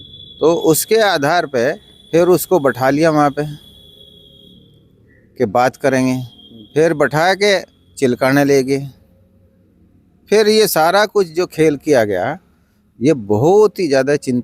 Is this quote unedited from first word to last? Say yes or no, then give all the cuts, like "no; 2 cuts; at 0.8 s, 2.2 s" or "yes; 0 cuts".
yes; 0 cuts